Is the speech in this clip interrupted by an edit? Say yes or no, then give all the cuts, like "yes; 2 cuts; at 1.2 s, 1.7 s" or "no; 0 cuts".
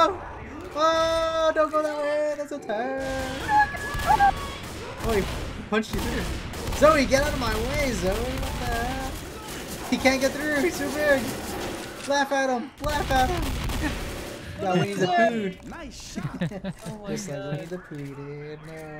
no; 0 cuts